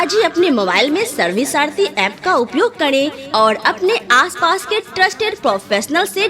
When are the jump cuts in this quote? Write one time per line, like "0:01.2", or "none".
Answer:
0:03.2